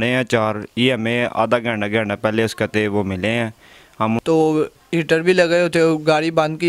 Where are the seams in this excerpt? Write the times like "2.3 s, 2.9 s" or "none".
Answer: 4.2 s